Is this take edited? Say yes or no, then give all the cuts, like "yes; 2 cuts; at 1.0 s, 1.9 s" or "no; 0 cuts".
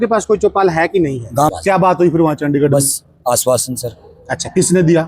yes; 1 cut; at 1.5 s